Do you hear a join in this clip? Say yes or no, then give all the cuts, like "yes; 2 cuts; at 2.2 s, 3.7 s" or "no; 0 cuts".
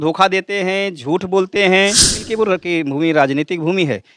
yes; 1 cut; at 2.2 s